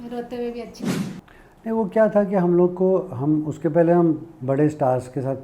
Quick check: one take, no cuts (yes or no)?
no